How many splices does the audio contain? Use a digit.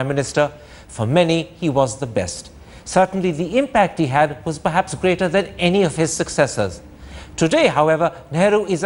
0